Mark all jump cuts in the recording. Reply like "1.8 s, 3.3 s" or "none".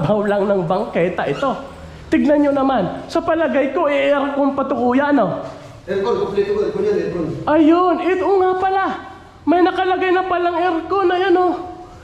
none